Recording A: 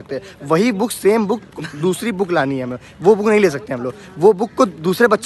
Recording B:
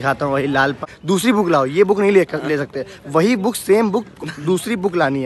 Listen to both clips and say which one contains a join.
B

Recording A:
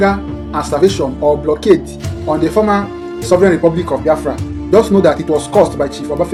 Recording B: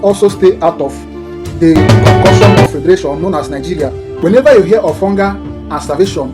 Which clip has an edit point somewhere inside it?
B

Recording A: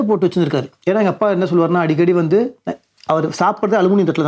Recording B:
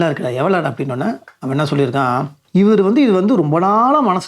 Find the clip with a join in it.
B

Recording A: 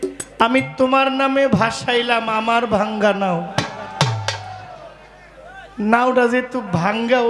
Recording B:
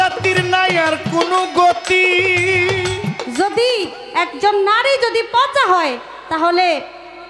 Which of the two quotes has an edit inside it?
B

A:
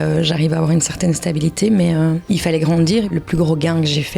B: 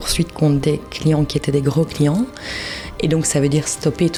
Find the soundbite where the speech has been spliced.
A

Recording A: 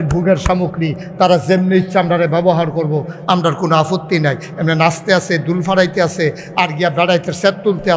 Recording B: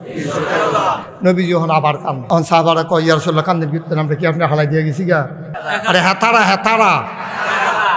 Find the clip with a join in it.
B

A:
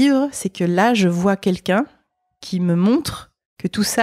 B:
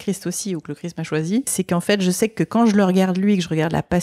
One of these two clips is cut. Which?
B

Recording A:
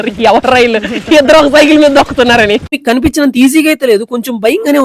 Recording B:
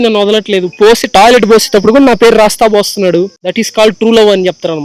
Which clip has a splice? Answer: A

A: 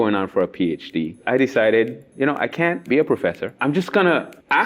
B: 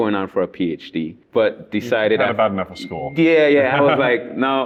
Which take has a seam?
A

